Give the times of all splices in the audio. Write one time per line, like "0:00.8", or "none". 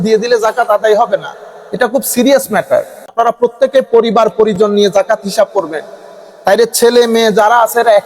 0:03.1